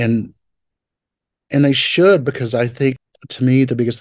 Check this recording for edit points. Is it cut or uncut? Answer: cut